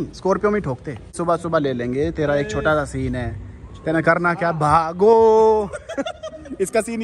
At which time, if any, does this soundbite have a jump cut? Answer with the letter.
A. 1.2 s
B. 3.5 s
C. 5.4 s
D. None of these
A